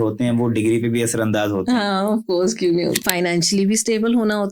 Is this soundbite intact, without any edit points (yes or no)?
no